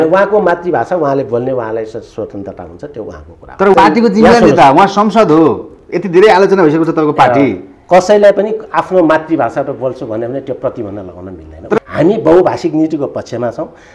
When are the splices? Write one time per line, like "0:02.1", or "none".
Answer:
0:03.7
0:11.8